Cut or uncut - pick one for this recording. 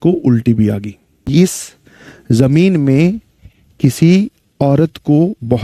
cut